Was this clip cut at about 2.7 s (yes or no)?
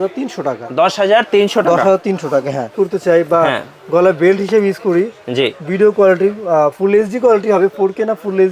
yes